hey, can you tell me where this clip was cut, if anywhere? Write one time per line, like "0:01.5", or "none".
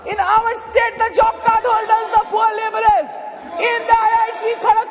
none